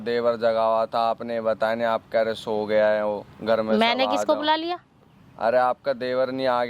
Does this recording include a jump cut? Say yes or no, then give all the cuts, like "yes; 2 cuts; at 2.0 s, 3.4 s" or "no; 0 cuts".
no; 0 cuts